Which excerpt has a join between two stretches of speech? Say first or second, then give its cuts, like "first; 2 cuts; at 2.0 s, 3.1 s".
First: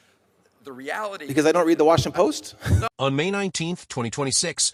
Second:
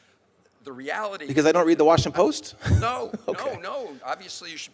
second; 1 cut; at 2.9 s